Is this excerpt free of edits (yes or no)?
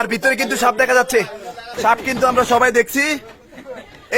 no